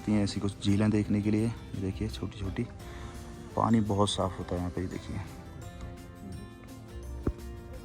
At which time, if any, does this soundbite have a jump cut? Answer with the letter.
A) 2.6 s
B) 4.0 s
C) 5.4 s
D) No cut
D